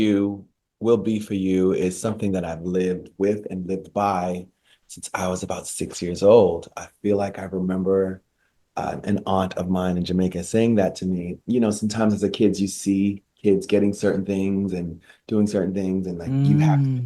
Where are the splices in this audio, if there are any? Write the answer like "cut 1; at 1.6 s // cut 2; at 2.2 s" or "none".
none